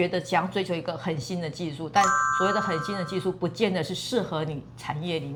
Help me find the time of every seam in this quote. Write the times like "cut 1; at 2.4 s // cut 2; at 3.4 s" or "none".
none